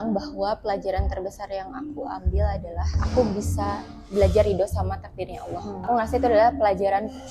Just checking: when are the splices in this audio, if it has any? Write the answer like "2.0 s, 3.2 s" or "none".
3.0 s, 5.9 s